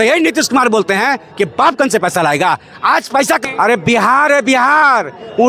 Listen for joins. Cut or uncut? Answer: cut